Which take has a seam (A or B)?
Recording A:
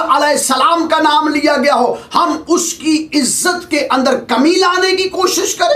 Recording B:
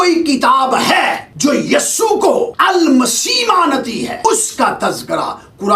B